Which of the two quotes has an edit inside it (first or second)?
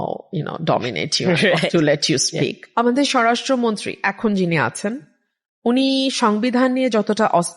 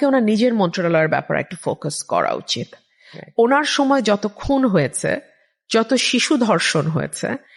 first